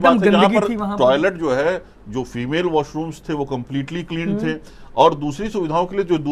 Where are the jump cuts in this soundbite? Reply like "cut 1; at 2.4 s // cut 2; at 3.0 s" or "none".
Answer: none

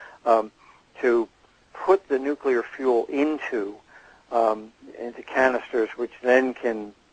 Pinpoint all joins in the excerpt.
cut 1; at 6.2 s

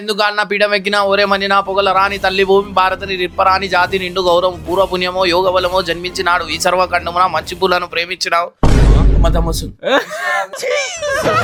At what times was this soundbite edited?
none

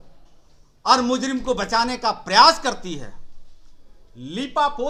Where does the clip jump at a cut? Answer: none

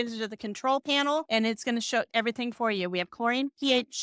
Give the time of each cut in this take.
cut 1; at 2.0 s

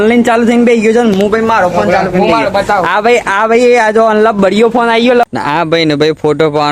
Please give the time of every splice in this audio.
cut 1; at 5.3 s

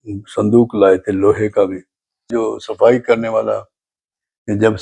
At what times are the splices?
cut 1; at 2.3 s

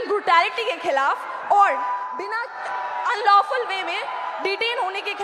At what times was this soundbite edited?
none

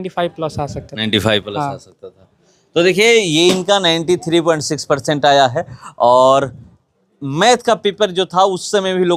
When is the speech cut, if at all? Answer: none

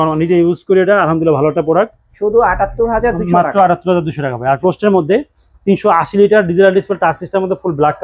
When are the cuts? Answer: cut 1; at 4.6 s

